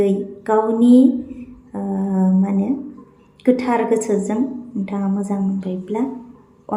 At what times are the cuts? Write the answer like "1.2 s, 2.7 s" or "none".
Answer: none